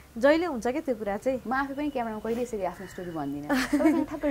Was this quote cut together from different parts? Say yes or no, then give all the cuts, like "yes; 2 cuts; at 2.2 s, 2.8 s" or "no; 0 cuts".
no; 0 cuts